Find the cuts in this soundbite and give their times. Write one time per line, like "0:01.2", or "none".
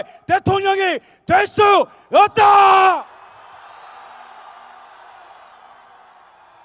none